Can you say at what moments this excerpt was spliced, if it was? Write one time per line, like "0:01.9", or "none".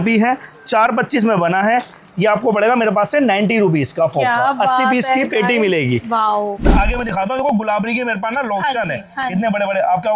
0:06.6